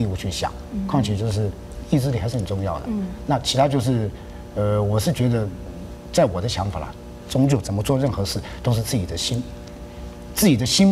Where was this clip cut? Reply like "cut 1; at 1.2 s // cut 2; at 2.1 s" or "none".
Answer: cut 1; at 1.7 s